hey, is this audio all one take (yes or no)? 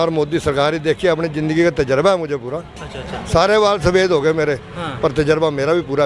yes